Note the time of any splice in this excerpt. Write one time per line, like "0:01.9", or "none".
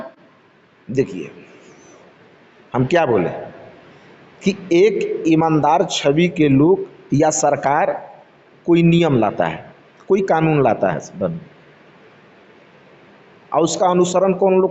none